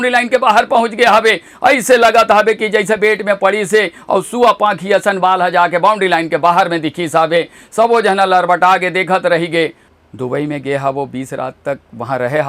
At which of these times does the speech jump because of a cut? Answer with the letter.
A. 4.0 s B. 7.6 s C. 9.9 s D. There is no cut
C